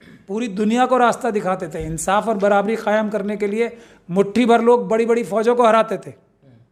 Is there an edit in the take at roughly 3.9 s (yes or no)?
no